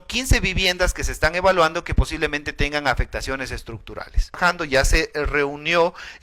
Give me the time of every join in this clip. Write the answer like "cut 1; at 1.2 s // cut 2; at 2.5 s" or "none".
cut 1; at 4.4 s

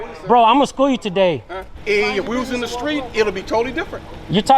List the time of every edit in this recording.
cut 1; at 1.7 s

